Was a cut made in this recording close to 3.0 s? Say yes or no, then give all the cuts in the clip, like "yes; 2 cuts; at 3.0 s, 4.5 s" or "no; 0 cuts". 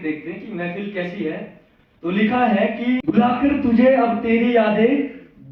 yes; 1 cut; at 3.0 s